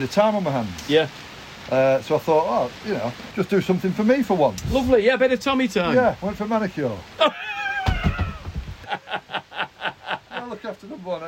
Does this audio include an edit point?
yes; 2 cuts; at 3.2 s, 8.8 s

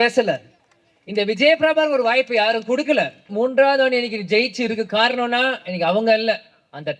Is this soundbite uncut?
no; 1 cut; at 3.3 s

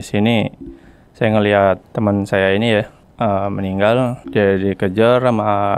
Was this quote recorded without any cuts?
no; 3 cuts; at 1.9 s, 3.0 s, 4.2 s

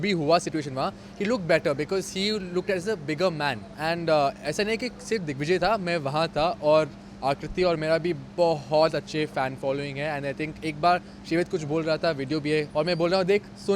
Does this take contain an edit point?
yes; 2 cuts; at 3.7 s, 12.7 s

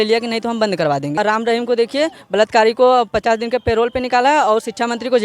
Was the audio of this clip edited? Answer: yes; 1 cut; at 1.1 s

